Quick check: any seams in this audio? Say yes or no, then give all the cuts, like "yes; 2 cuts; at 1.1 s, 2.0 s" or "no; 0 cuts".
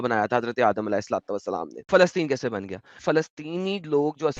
yes; 2 cuts; at 1.9 s, 3.0 s